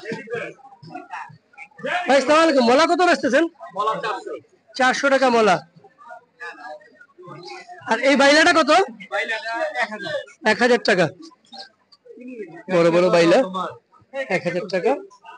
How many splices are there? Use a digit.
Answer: 0